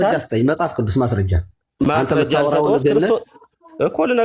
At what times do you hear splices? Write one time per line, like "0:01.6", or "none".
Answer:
none